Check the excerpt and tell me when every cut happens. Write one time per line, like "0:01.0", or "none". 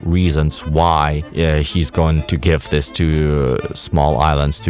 0:01.2
0:02.2